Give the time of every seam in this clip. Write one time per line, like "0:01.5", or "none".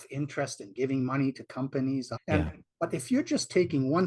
0:02.1

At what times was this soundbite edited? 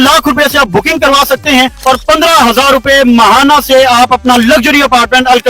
none

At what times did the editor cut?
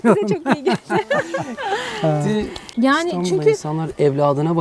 0:02.6

